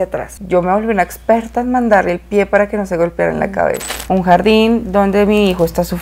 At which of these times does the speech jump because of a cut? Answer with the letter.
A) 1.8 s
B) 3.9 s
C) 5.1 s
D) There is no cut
B